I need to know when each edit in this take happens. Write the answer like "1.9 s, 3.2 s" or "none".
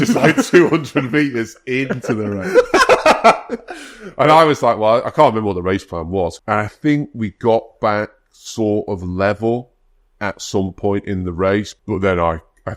6.4 s, 11.7 s

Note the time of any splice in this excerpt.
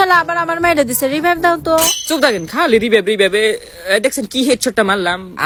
none

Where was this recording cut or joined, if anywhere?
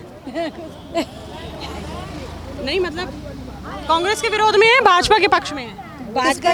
none

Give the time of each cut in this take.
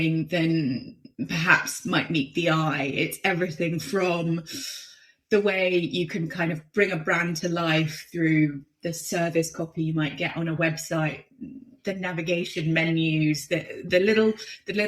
none

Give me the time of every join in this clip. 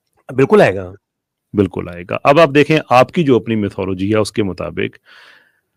none

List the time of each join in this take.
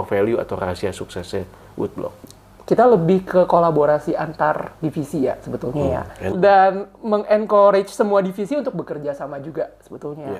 2.3 s, 6.3 s

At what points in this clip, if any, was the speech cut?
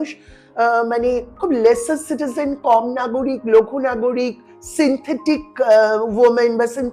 none

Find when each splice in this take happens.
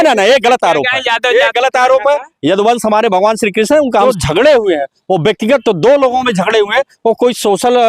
4.0 s

